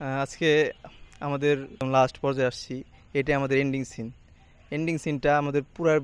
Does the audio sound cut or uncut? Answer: cut